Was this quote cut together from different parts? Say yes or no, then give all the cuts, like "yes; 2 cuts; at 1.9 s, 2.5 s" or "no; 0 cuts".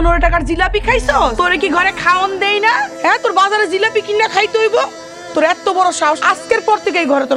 yes; 3 cuts; at 1.3 s, 2.9 s, 6.2 s